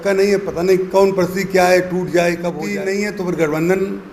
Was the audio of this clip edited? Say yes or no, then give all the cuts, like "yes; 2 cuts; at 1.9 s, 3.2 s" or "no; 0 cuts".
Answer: yes; 1 cut; at 2.6 s